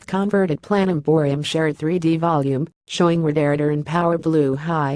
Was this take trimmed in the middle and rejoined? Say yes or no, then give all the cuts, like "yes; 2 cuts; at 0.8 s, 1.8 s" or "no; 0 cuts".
yes; 1 cut; at 1.3 s